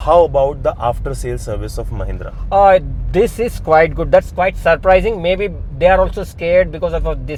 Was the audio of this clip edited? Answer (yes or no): no